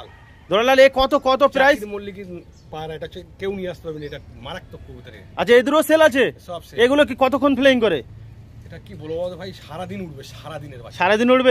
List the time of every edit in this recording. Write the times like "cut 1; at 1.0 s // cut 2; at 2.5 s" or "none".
none

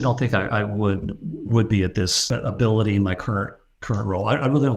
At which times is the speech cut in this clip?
cut 1; at 2.2 s

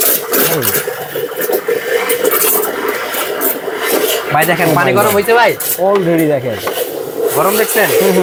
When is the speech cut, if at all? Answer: none

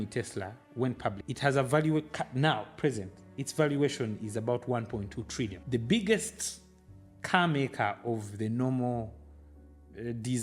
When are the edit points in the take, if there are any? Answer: cut 1; at 1.2 s // cut 2; at 5.6 s

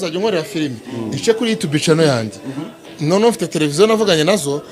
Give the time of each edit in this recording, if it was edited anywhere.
none

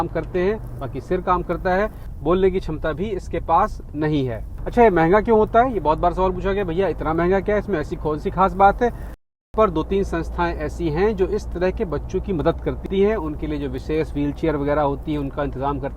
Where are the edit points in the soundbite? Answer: cut 1; at 9.2 s

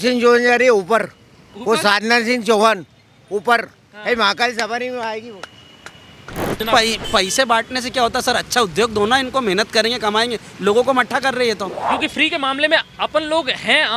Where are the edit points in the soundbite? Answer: cut 1; at 6.6 s // cut 2; at 11.9 s

